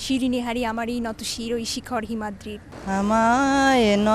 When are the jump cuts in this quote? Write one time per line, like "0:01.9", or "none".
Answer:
0:02.7